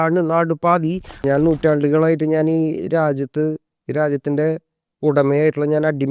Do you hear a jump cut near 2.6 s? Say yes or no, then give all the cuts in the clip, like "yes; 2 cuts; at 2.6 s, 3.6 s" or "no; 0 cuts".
no; 1 cut; at 1.2 s